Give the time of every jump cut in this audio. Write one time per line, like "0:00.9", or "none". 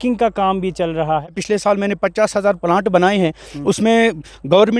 0:01.4